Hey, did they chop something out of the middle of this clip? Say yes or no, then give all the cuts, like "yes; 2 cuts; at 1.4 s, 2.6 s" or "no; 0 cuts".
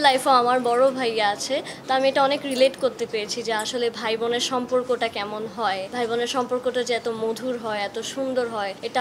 no; 0 cuts